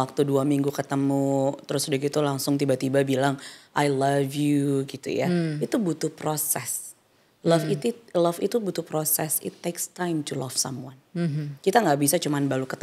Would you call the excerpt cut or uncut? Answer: uncut